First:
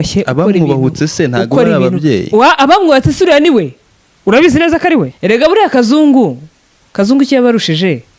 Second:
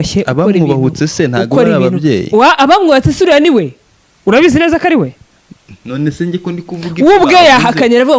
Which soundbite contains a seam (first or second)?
first